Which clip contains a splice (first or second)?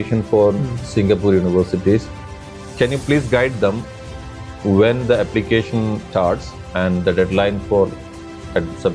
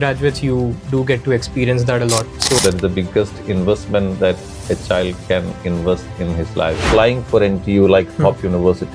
second